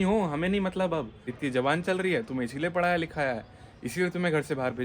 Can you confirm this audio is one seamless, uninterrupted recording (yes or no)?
no